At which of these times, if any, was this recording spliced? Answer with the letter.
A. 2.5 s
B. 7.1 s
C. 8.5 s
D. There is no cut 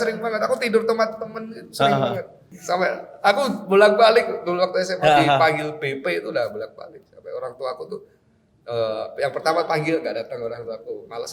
A